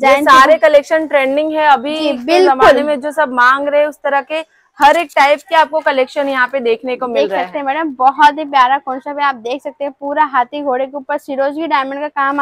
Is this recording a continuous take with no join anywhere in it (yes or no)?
yes